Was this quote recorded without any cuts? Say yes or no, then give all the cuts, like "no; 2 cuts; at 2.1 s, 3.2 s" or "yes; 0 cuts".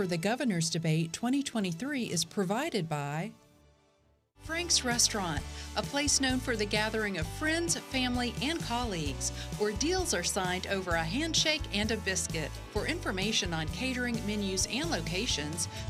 yes; 0 cuts